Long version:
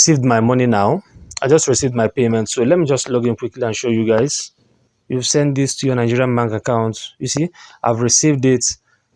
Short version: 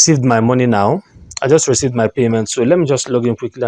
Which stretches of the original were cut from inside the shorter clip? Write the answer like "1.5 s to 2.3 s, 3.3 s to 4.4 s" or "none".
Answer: none